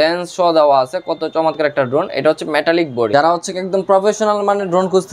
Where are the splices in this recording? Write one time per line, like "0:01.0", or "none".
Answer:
0:03.1